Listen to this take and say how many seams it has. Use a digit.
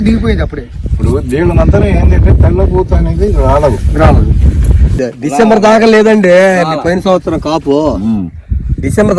1